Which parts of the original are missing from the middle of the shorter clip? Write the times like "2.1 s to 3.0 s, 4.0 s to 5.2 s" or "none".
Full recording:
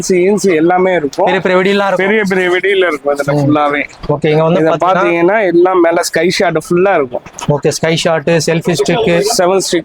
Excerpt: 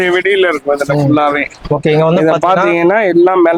none